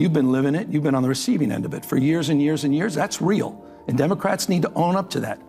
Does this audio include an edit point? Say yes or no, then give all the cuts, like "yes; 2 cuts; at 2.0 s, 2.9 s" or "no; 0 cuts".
no; 0 cuts